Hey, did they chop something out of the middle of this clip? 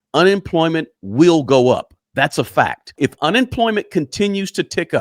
yes; 1 cut; at 2.9 s

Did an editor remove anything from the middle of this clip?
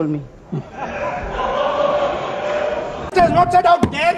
no; 0 cuts

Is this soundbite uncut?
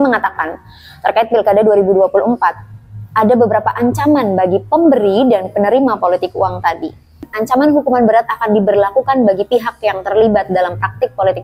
no; 1 cut; at 7.3 s

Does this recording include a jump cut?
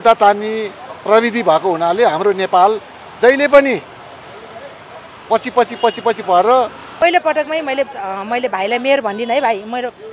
yes; 1 cut; at 6.8 s

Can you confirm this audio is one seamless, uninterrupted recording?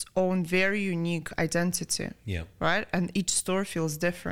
yes; 0 cuts

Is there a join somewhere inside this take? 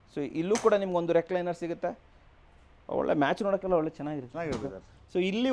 no; 0 cuts

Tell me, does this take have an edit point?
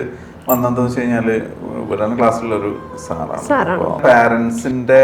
yes; 1 cut; at 4.0 s

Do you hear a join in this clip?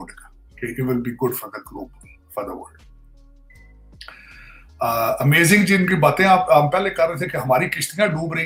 no; 0 cuts

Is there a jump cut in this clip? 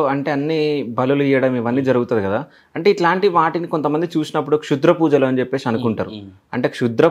no; 0 cuts

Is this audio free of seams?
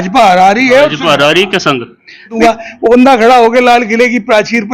no; 1 cut; at 2.4 s

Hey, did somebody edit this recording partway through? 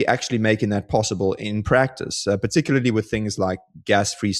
no; 0 cuts

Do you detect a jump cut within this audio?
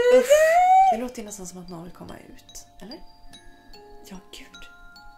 yes; 1 cut; at 1.2 s

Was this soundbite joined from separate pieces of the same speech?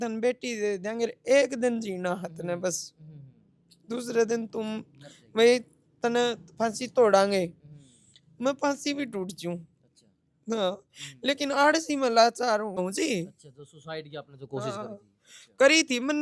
yes; 1 cut; at 12.8 s

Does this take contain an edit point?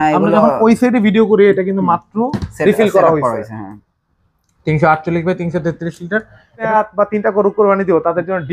yes; 1 cut; at 6.7 s

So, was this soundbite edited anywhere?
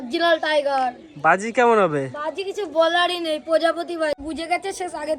yes; 1 cut; at 4.3 s

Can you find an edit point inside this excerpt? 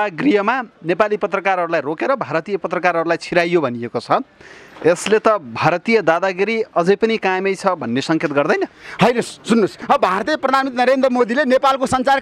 yes; 1 cut; at 9.8 s

